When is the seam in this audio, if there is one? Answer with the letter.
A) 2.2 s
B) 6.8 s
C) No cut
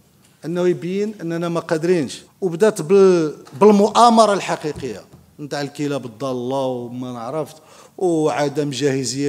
A